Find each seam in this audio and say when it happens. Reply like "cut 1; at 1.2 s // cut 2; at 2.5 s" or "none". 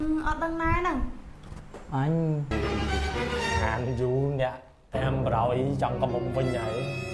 cut 1; at 2.5 s